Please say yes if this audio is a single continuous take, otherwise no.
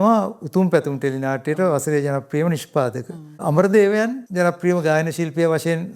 no